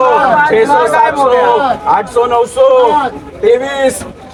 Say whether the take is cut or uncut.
uncut